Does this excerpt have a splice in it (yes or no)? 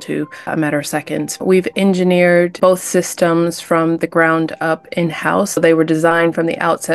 yes